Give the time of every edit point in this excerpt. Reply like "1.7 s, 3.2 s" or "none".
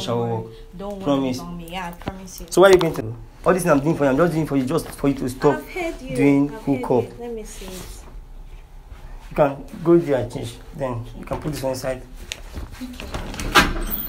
3.0 s